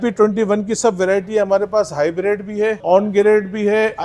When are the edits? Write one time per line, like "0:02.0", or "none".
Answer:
0:02.8